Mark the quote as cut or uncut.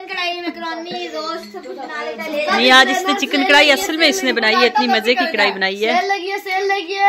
uncut